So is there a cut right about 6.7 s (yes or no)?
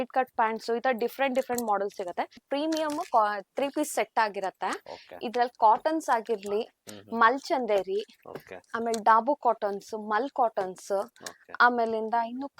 no